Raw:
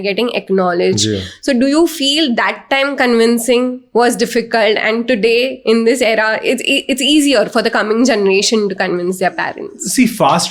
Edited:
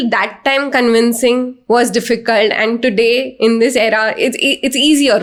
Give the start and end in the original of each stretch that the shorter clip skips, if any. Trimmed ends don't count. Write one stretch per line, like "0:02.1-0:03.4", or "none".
none